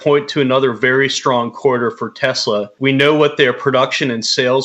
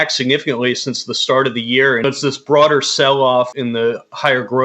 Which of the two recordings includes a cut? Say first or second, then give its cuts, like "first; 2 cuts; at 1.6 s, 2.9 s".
second; 2 cuts; at 2.0 s, 3.5 s